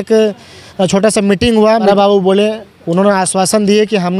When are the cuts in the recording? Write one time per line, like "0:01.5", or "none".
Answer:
0:01.9